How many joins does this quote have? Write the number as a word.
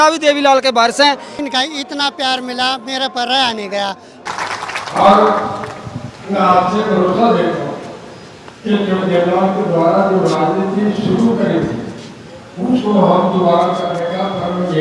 two